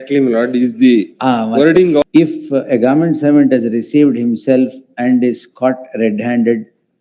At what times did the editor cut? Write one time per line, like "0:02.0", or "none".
0:02.0

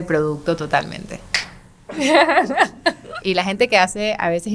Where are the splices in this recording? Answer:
0:03.1

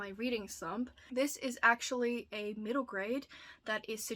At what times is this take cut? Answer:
0:01.0

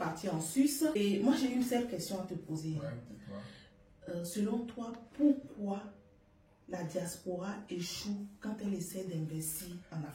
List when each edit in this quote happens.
0:00.9

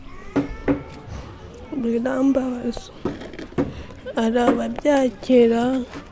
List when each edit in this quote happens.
0:02.9

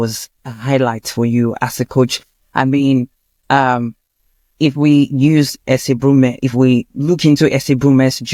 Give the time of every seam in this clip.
none

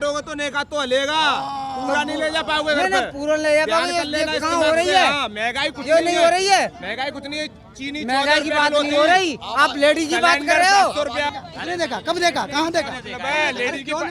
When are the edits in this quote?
0:11.4

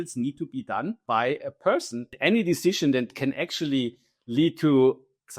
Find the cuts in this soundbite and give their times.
0:01.0
0:02.1

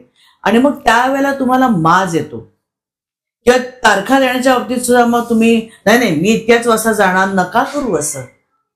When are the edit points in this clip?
none

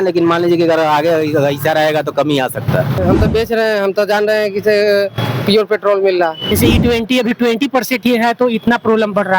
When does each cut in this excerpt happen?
0:03.0
0:06.6

